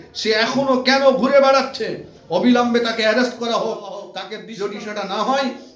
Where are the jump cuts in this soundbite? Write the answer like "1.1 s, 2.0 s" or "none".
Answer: 4.2 s